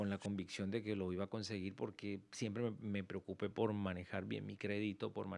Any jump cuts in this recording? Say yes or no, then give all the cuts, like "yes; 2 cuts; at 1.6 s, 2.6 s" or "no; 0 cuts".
no; 0 cuts